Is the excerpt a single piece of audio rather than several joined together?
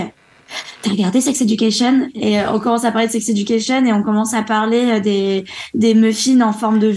no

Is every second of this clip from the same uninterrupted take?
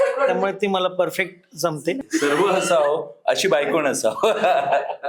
no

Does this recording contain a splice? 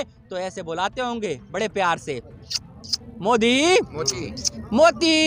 no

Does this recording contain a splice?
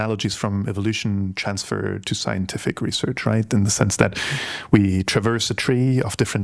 no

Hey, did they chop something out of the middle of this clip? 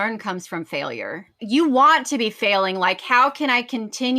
yes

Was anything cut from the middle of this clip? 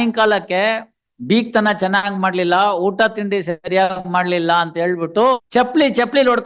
yes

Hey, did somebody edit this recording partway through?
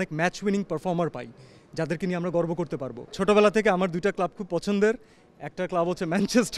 yes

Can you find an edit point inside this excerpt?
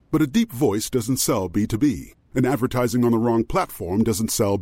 no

